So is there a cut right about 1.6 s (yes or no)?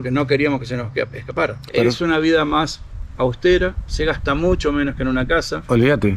yes